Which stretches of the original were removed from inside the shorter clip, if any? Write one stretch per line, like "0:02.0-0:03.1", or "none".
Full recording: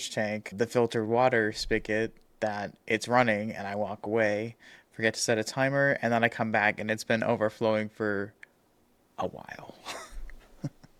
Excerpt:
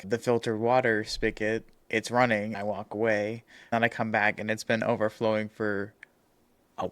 0:02.2-0:02.7
0:03.5-0:03.7
0:04.8-0:06.1